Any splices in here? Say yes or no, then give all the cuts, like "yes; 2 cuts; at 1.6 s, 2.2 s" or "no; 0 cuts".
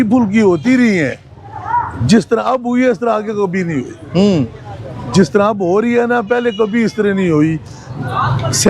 no; 0 cuts